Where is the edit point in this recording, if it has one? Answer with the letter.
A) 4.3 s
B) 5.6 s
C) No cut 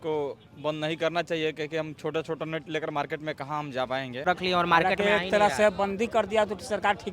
A